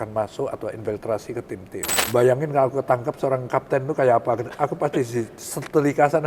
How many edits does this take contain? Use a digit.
1